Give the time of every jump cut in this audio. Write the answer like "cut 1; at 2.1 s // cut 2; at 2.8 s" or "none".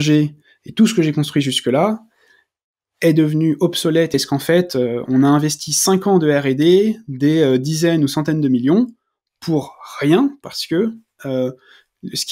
cut 1; at 4.1 s